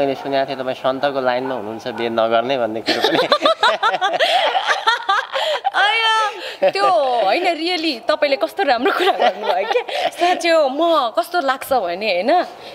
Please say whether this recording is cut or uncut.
uncut